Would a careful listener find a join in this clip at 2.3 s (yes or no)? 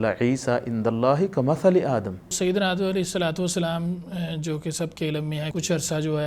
yes